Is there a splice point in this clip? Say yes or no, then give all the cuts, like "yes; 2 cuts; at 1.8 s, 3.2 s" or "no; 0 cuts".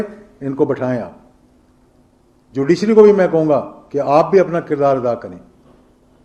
no; 0 cuts